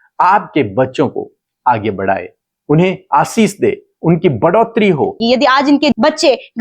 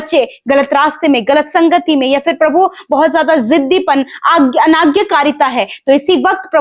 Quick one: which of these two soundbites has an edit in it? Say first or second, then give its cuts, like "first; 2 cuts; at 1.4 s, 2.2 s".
first; 1 cut; at 5.2 s